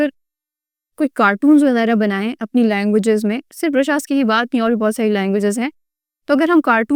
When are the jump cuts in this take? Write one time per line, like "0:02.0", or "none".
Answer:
none